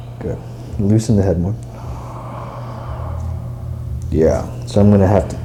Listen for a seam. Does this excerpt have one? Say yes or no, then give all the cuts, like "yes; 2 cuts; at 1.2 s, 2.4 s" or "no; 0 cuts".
no; 0 cuts